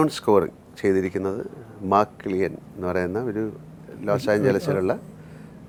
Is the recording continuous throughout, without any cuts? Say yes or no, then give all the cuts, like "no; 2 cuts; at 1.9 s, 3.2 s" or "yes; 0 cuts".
yes; 0 cuts